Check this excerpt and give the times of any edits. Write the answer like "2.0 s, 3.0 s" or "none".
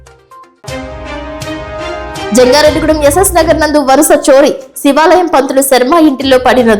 2.3 s